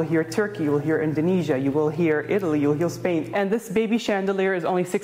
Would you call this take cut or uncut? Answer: cut